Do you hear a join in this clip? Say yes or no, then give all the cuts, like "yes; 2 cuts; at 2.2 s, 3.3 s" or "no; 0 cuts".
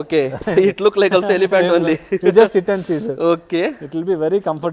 no; 0 cuts